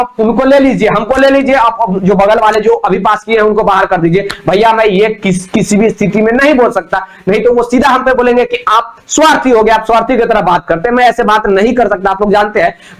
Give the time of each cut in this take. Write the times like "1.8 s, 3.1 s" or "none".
none